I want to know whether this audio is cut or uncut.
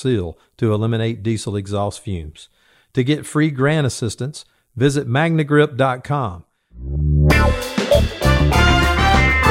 cut